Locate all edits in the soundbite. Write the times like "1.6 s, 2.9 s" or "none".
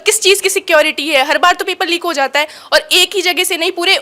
none